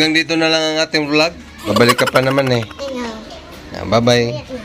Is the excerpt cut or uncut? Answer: cut